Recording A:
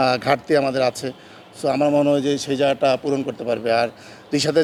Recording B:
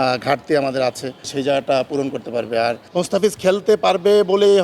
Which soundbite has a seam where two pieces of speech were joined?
B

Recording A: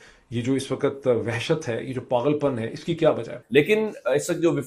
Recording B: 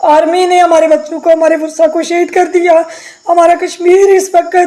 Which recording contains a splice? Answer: A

